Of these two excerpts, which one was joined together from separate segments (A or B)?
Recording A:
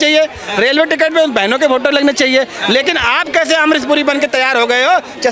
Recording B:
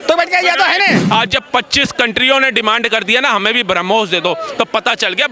B